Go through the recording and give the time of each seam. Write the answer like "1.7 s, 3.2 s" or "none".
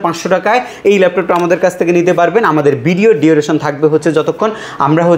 none